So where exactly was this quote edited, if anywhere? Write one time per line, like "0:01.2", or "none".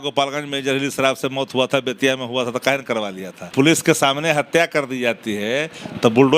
0:03.5